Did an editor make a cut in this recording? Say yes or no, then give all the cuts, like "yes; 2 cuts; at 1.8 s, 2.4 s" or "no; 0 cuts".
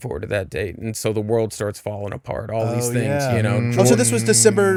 no; 0 cuts